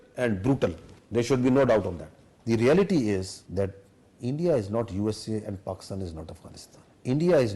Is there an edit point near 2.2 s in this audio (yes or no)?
yes